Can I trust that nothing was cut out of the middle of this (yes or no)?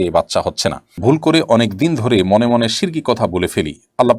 no